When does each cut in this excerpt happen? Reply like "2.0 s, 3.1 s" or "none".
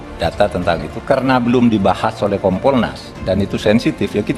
2.5 s